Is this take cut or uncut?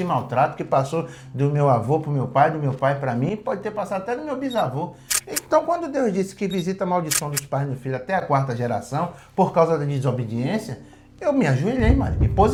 uncut